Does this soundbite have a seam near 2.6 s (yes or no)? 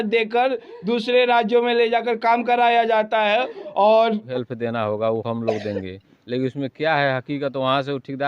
no